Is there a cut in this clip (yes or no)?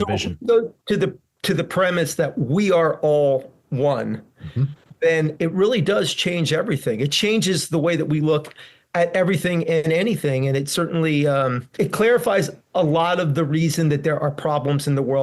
yes